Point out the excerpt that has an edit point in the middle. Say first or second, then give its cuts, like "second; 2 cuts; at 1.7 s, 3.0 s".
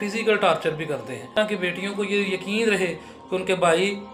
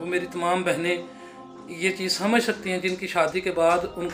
first; 1 cut; at 1.3 s